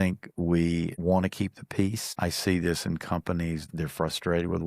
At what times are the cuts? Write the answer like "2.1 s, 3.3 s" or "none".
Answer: 0.9 s, 2.1 s, 3.7 s